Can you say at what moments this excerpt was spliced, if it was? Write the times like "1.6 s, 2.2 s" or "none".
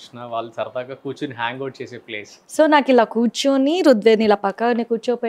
2.3 s